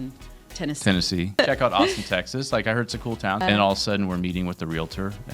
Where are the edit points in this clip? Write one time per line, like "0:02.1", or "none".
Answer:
0:01.4
0:03.4